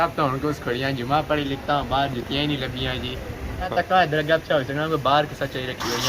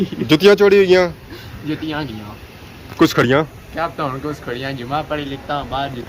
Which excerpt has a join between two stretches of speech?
first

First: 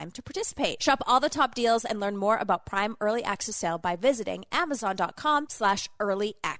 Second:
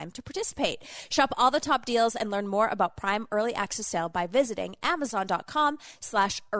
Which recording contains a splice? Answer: first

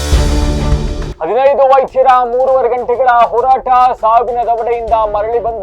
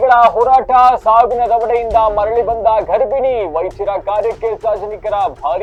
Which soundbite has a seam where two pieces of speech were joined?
first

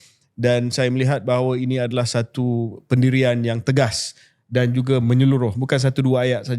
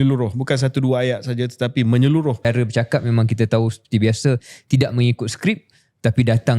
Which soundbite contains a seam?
second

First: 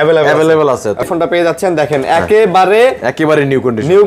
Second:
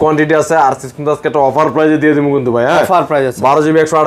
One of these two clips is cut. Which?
first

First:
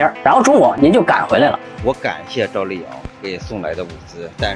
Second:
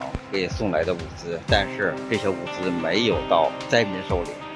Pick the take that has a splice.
first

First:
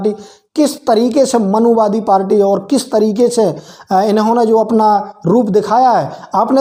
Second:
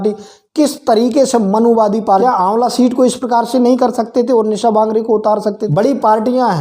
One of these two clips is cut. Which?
second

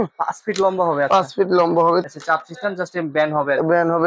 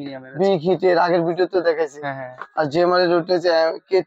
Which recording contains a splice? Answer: first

